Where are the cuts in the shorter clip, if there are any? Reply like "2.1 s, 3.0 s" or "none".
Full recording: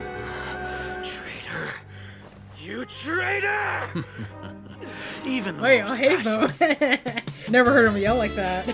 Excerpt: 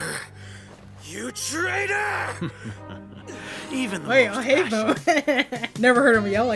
5.6 s